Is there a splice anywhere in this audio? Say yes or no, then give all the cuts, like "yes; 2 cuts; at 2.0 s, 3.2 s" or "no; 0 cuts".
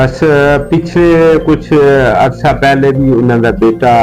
no; 0 cuts